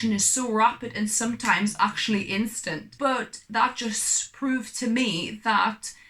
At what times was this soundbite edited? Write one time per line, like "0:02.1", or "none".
0:02.9